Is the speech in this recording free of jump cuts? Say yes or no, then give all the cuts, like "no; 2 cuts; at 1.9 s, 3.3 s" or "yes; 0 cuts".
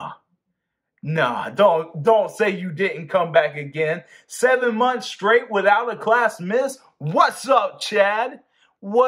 yes; 0 cuts